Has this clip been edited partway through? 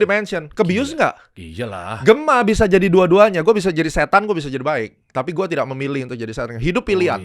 no; 0 cuts

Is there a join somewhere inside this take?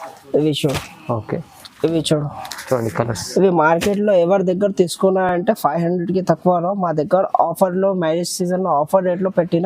no; 0 cuts

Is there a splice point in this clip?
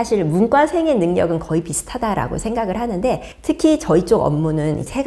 no; 0 cuts

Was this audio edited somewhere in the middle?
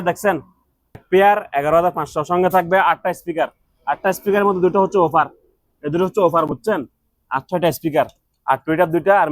yes; 1 cut; at 1.0 s

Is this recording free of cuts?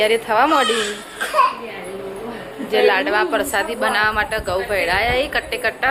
yes; 0 cuts

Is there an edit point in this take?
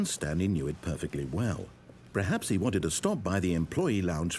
no; 0 cuts

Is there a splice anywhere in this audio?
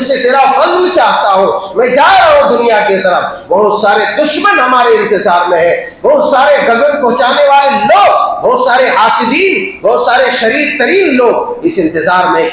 no; 0 cuts

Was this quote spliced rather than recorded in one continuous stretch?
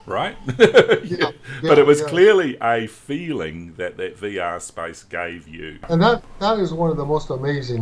yes; 1 cut; at 5.8 s

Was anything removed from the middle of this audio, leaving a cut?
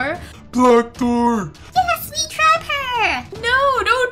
yes; 1 cut; at 1.6 s

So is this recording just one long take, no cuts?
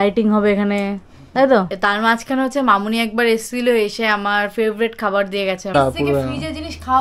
no; 2 cuts; at 1.7 s, 5.7 s

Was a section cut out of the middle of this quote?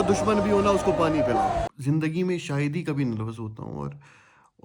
yes; 1 cut; at 1.7 s

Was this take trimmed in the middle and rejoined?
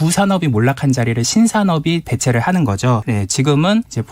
yes; 1 cut; at 3.0 s

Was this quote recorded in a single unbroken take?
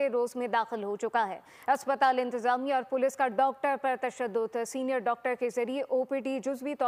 yes; 0 cuts

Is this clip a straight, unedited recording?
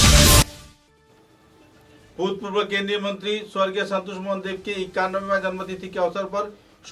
no; 1 cut; at 1.0 s

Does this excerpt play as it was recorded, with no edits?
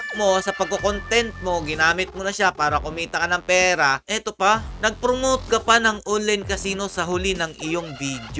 yes; 0 cuts

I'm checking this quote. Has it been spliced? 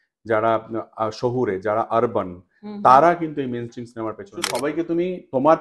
yes; 1 cut; at 4.4 s

